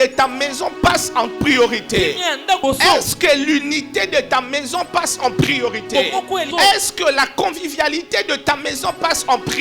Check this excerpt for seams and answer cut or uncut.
cut